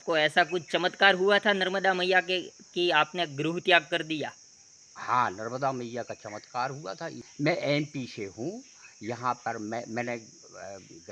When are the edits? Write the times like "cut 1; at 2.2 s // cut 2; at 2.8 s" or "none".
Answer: cut 1; at 7.2 s